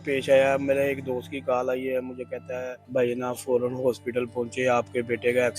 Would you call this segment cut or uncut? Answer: cut